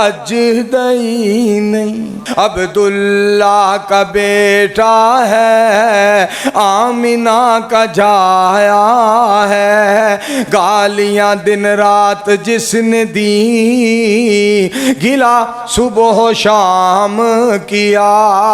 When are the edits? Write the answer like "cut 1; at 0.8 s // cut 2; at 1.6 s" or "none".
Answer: cut 1; at 2.2 s